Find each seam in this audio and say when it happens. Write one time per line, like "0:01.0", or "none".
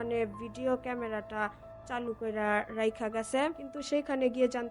0:03.6